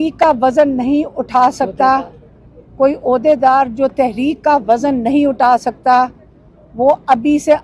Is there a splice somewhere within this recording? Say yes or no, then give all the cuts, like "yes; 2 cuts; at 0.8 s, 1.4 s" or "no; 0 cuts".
no; 0 cuts